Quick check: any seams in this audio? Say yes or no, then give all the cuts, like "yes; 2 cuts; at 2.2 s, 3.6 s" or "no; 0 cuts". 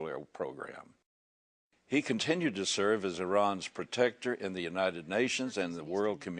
yes; 1 cut; at 1.5 s